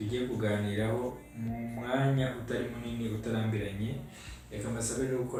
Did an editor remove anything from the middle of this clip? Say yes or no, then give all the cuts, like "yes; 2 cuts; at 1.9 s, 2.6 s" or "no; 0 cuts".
no; 0 cuts